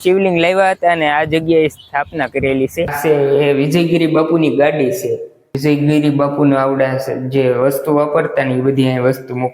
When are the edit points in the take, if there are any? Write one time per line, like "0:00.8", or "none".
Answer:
0:02.9
0:05.4